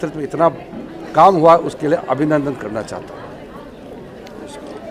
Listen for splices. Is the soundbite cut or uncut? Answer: uncut